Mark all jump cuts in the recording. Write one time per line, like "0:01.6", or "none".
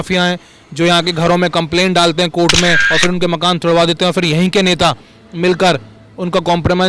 0:02.9